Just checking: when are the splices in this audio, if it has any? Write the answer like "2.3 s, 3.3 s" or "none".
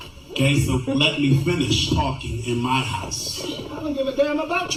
none